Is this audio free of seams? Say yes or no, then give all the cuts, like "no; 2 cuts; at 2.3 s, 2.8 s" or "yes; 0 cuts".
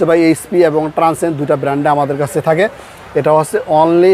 yes; 0 cuts